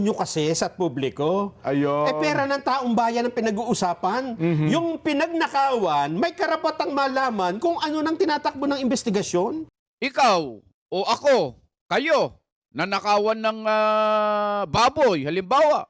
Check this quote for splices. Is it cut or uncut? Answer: cut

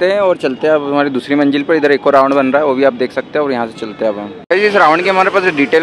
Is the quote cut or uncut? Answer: cut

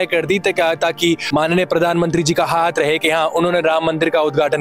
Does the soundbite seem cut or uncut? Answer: uncut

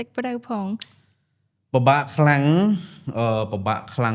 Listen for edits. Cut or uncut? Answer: uncut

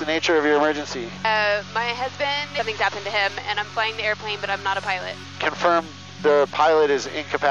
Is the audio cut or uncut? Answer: cut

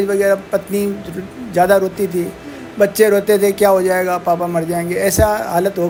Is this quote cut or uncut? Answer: uncut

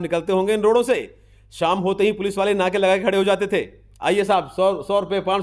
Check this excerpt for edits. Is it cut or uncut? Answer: uncut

